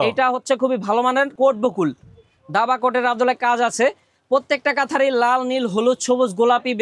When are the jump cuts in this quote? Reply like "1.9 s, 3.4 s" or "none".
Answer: 1.3 s

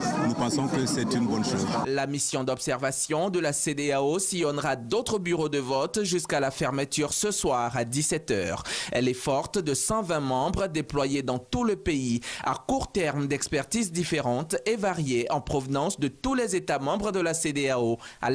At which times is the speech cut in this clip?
1.1 s

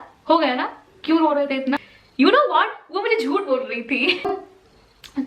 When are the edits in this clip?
2.0 s, 4.2 s

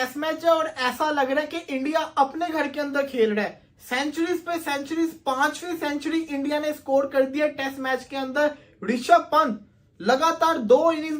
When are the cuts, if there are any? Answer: none

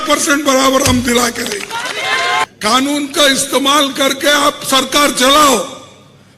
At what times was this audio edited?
2.4 s

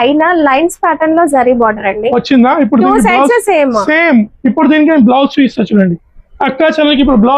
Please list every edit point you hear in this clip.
none

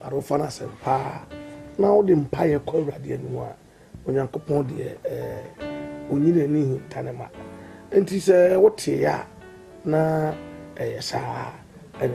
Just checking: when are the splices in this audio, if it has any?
4.0 s

